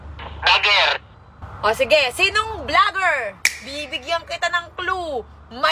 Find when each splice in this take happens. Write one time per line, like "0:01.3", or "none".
none